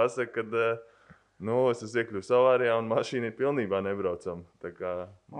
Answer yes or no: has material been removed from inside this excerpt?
no